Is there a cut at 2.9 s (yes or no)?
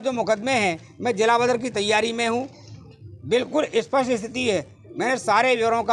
no